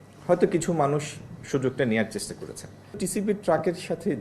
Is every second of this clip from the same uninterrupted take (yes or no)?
no